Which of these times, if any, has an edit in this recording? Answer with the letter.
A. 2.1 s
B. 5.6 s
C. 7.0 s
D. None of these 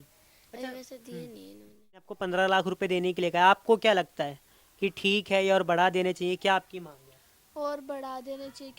A